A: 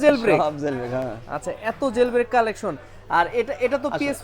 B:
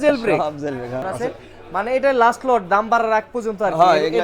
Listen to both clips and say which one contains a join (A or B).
B